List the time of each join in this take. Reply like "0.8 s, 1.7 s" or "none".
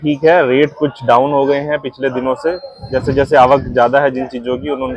2.9 s